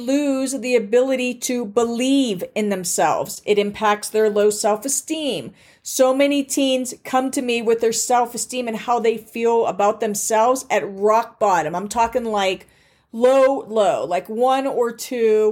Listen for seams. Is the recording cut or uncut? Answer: uncut